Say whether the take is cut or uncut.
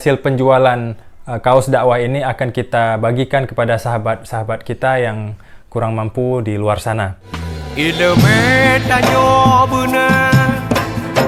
uncut